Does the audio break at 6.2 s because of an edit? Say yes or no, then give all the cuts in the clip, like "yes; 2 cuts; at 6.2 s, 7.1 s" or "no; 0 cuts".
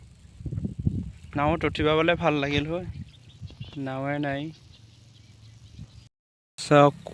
yes; 1 cut; at 6.2 s